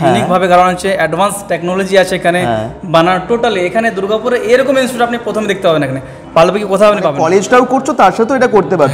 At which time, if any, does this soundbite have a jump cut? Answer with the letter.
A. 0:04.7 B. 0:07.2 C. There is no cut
B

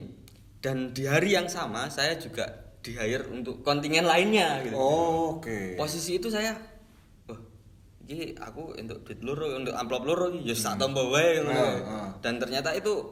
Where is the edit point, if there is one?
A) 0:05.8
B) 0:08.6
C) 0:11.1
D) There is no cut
D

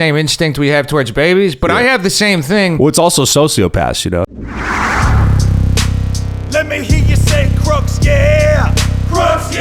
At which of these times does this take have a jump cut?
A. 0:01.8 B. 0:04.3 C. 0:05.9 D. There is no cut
B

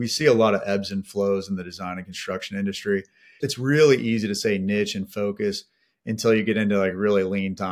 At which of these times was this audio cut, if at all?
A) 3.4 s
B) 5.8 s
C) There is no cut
A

